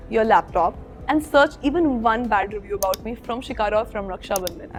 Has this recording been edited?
no; 0 cuts

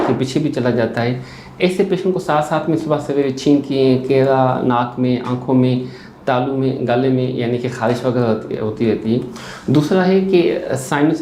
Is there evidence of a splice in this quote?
no; 0 cuts

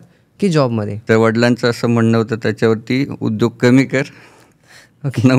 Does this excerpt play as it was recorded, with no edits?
no; 1 cut; at 0.9 s

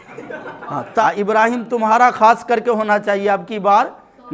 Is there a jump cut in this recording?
yes; 1 cut; at 1.0 s

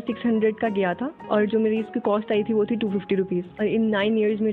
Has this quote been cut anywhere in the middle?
yes; 1 cut; at 3.5 s

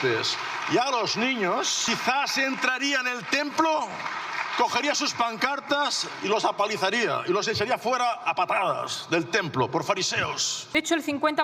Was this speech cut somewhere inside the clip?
yes; 2 cuts; at 1.9 s, 10.5 s

